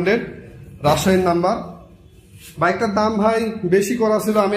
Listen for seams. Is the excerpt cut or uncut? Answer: uncut